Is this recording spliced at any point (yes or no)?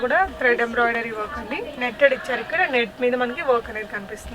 yes